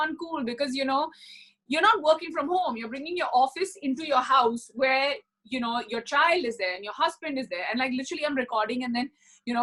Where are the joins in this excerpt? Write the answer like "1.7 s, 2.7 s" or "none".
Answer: none